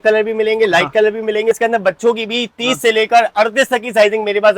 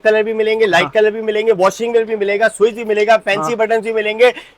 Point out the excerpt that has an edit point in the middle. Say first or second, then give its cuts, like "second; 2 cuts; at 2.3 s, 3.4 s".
first; 1 cut; at 1.6 s